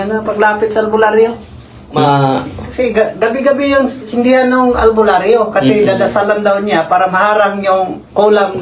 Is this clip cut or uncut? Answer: cut